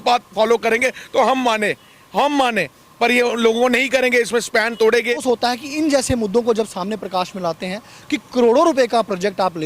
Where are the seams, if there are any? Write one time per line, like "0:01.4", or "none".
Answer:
0:05.2